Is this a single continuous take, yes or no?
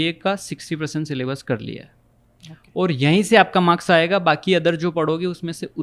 yes